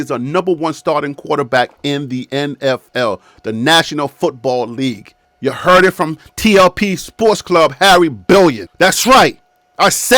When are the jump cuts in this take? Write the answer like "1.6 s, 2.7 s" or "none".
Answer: 8.7 s